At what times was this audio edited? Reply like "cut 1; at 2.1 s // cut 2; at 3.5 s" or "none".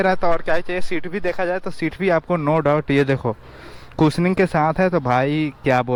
none